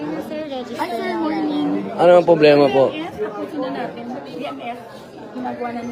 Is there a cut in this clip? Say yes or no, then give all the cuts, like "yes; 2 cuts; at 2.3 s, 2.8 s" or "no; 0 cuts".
no; 0 cuts